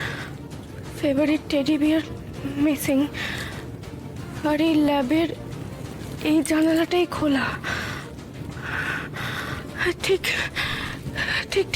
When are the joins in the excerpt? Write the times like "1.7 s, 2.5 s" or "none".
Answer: none